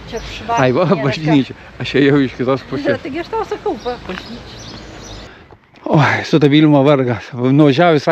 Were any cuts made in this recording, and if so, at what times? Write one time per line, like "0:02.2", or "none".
0:05.3